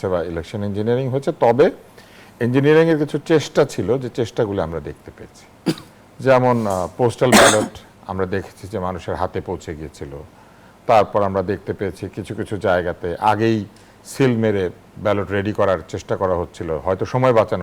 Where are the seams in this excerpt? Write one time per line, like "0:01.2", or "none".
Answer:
none